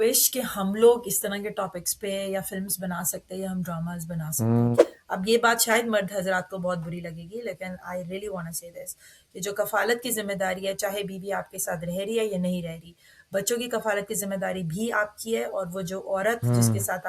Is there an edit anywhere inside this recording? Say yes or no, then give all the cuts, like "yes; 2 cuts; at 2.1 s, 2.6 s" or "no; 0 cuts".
yes; 1 cut; at 4.9 s